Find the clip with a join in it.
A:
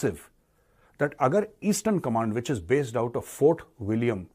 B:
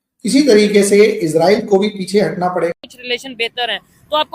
B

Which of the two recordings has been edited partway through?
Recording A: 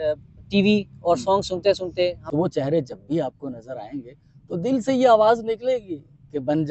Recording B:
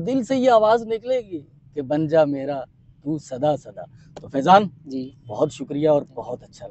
A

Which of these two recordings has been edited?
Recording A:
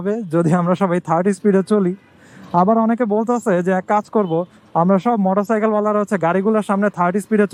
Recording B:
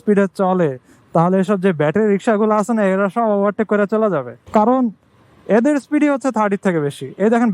B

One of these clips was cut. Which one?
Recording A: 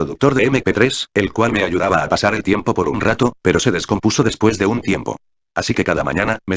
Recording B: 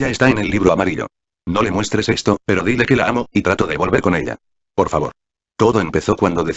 A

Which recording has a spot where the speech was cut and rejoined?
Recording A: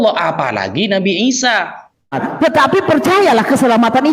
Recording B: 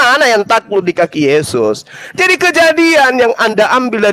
A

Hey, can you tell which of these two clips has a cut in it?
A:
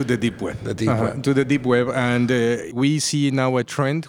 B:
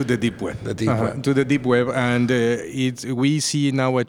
A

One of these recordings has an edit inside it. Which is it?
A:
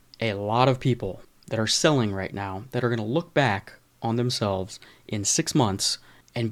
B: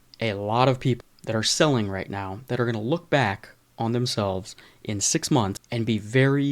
B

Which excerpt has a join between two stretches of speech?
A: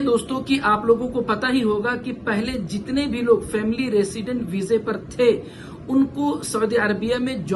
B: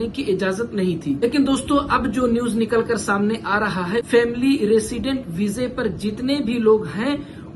B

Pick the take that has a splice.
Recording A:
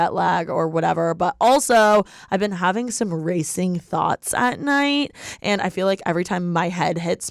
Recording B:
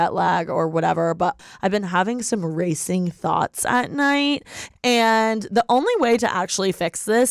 B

